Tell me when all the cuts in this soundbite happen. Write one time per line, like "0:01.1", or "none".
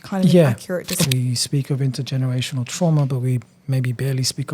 0:01.1

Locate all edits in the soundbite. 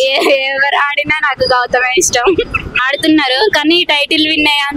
0:02.7

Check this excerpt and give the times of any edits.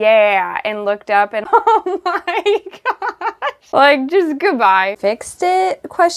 0:01.5
0:03.6
0:04.9

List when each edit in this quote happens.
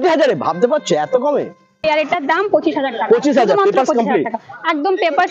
0:01.8

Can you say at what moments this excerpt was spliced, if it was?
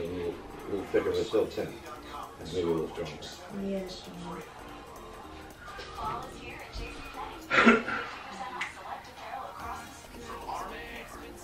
none

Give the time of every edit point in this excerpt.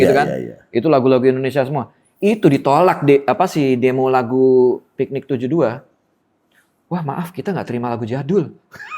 none

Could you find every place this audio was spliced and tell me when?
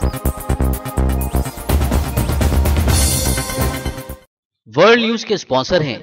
0:04.2

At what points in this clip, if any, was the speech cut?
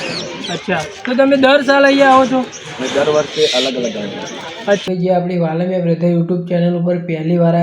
0:04.8

